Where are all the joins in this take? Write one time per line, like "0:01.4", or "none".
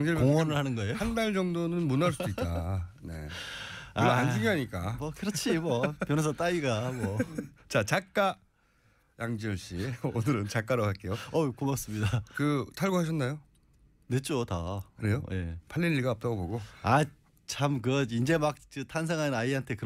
none